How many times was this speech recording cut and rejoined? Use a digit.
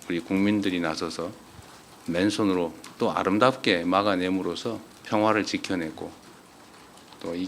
1